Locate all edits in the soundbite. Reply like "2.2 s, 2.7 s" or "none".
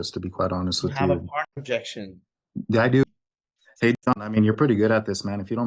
3.0 s